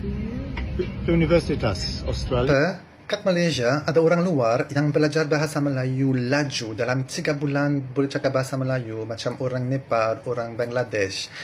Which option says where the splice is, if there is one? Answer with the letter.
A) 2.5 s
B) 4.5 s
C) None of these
A